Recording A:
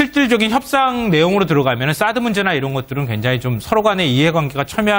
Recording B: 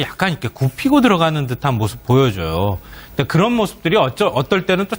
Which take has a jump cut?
B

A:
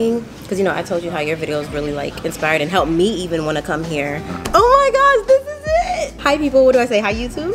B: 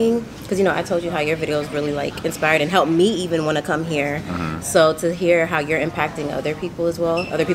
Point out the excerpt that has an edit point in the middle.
A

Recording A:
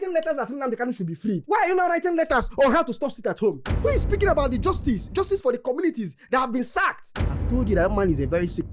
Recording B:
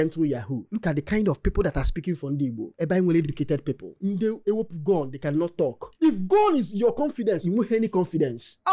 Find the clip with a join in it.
A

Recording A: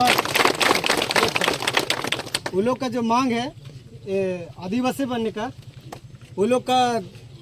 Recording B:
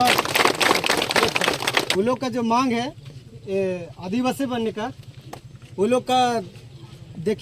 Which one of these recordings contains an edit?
B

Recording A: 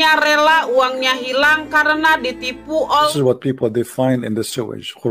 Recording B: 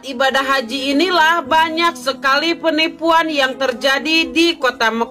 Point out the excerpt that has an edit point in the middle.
A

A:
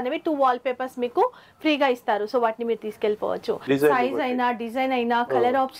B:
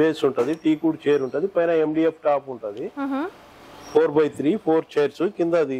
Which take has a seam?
A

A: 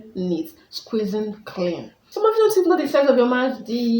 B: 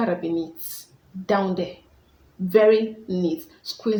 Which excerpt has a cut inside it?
A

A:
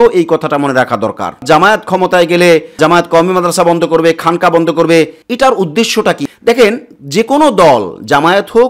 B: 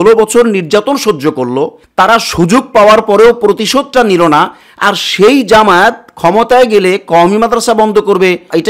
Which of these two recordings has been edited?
A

